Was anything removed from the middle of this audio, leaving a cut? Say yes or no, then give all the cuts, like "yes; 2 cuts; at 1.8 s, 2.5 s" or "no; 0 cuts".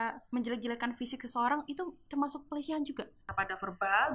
yes; 1 cut; at 3.2 s